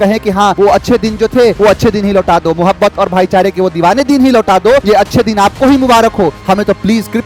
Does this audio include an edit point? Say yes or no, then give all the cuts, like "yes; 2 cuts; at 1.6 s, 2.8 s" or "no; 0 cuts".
no; 0 cuts